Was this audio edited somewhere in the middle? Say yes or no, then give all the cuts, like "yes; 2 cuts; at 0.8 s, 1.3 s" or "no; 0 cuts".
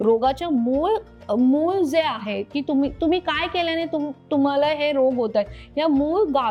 no; 0 cuts